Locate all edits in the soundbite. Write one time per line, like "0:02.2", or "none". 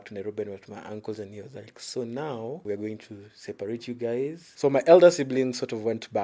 0:02.6
0:04.4